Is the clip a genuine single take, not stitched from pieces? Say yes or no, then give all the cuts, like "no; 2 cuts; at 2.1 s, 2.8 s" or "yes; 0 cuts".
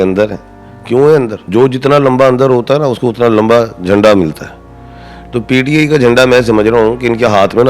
no; 1 cut; at 1.4 s